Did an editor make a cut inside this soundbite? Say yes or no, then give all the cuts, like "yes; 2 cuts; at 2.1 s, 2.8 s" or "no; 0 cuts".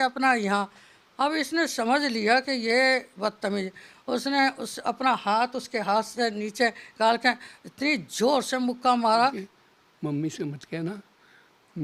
yes; 1 cut; at 9.5 s